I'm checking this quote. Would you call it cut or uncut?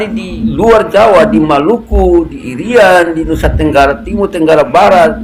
uncut